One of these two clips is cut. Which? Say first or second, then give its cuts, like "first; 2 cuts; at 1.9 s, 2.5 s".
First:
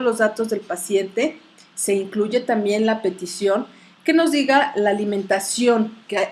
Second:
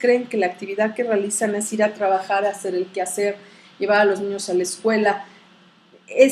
first; 1 cut; at 3.3 s